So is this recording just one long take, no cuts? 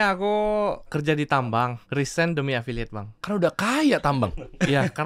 no; 3 cuts; at 0.9 s, 1.8 s, 3.1 s

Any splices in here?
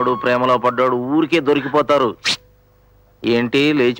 no; 0 cuts

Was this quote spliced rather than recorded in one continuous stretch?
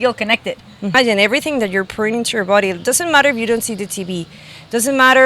yes; 1 cut; at 0.9 s

